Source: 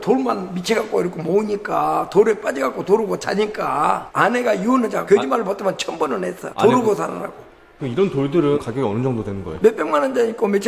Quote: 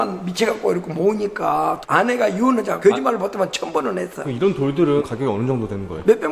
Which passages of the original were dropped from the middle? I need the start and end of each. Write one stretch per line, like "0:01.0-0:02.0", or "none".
0:02.1-0:04.0
0:06.4-0:07.7

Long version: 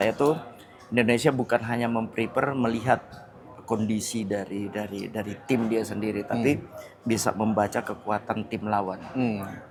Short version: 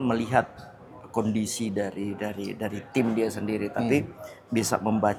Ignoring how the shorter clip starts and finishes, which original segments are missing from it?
none

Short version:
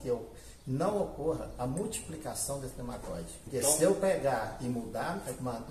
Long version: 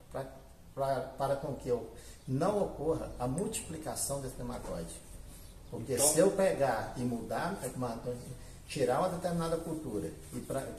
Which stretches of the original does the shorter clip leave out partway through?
0:05.1-0:05.8

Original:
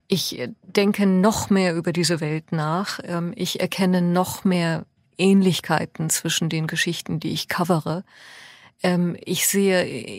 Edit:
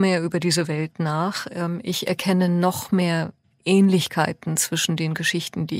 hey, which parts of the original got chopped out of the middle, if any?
none

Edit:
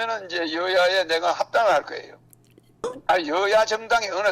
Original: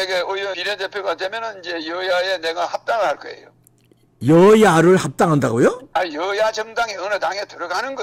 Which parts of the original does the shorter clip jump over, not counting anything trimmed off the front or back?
0:04.2-0:05.7

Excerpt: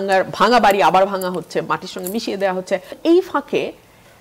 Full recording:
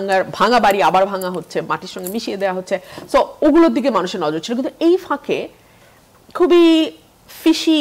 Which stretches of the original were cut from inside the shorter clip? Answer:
0:02.9-0:04.7

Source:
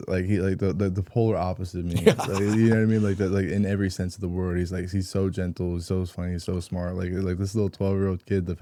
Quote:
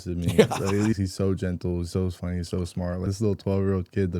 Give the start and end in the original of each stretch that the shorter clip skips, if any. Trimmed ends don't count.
0:02.6-0:04.9
0:07.0-0:07.4

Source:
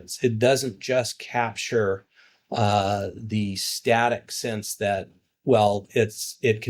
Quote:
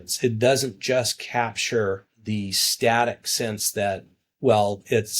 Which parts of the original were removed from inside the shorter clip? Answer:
0:02.1-0:03.2

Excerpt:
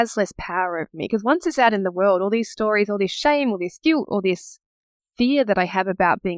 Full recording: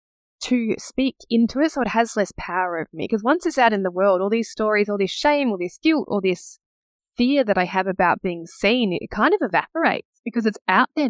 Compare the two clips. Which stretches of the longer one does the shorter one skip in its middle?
none

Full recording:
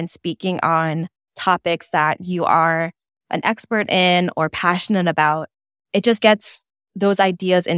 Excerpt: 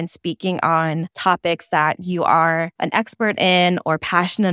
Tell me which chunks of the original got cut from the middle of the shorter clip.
0:01.1-0:01.3
0:03.0-0:03.3

